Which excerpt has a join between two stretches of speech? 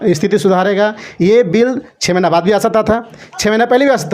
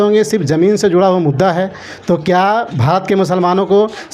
first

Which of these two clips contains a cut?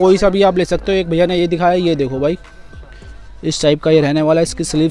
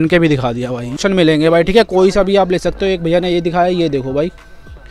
second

